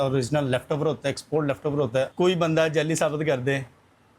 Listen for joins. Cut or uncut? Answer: cut